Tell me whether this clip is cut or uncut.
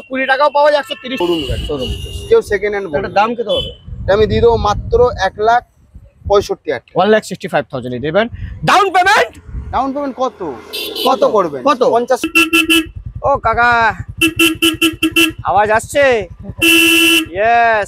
cut